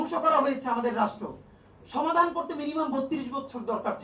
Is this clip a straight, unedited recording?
yes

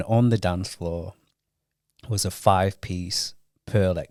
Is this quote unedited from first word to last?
yes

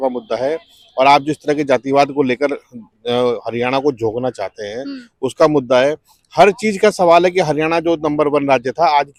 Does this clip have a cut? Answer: no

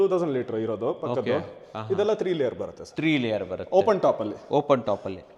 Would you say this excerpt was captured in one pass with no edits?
yes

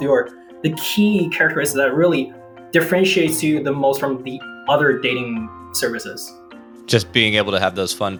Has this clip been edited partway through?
no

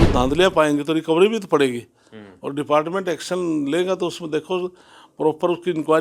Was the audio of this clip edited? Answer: no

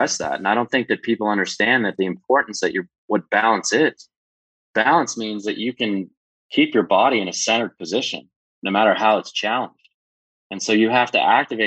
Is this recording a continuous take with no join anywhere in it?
yes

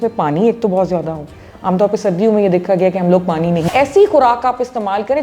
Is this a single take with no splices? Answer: no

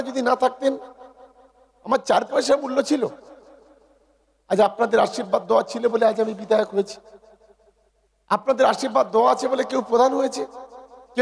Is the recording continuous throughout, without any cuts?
yes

